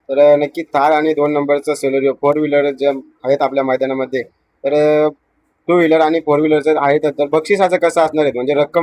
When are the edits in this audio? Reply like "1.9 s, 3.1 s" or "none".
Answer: none